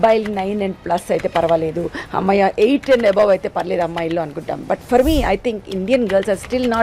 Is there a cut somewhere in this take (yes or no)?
no